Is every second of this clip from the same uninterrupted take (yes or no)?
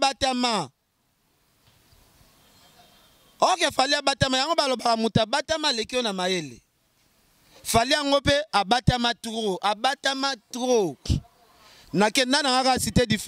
yes